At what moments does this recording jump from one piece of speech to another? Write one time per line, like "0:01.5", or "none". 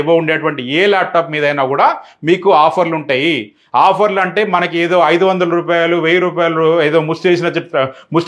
none